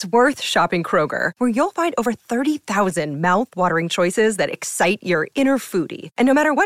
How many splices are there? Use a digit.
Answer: 0